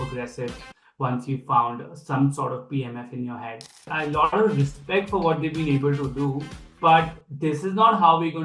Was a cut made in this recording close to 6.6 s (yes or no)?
yes